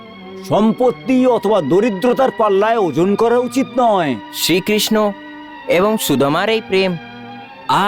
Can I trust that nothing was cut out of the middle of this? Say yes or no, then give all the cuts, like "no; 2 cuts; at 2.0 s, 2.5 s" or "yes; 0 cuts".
yes; 0 cuts